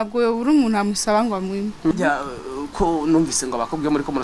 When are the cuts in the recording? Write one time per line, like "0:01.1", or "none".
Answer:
0:01.9